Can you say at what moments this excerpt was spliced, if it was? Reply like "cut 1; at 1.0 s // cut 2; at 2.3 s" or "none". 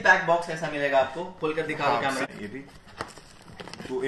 cut 1; at 2.3 s